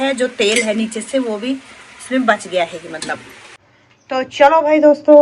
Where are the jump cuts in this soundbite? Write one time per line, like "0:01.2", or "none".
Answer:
0:03.6

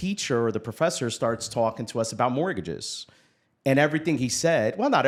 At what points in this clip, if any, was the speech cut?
none

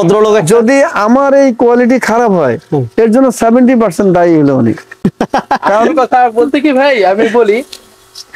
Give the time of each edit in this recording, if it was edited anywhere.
none

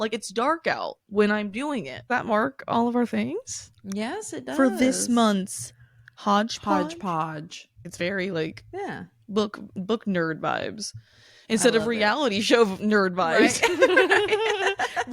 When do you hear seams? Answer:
0:02.1
0:07.8

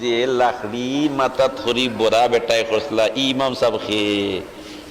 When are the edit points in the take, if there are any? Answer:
none

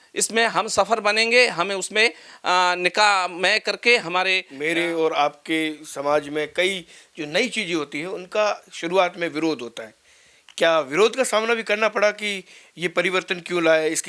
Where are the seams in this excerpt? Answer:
0:04.5

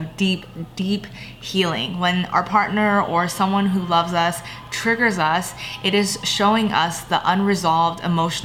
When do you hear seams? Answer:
none

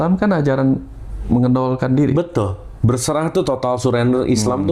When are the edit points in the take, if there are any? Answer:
none

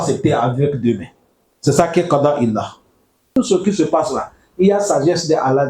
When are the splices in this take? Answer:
0:03.3

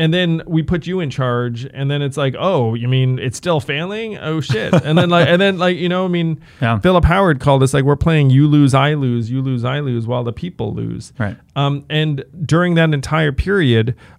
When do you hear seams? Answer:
none

